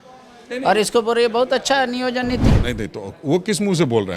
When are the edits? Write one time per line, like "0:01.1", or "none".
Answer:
0:02.5